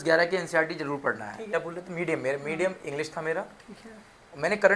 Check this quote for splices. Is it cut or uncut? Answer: cut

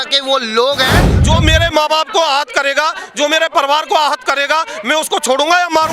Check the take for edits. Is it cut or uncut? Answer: cut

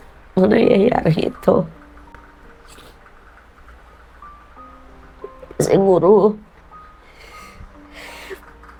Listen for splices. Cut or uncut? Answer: uncut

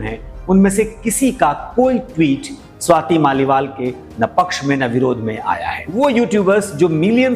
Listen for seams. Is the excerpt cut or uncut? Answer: cut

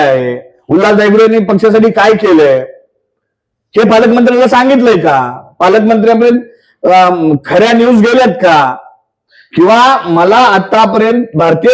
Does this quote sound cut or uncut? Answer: uncut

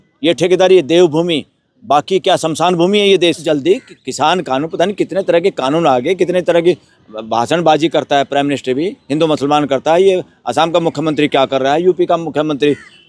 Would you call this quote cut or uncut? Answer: cut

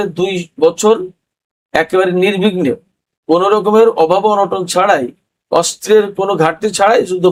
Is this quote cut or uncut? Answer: uncut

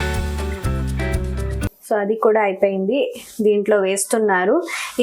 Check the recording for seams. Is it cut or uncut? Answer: cut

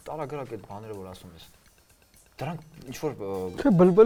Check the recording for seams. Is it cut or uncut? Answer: uncut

